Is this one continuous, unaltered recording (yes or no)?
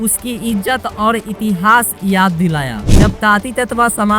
no